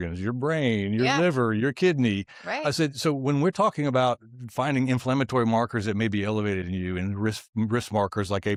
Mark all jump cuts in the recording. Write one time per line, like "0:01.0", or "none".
none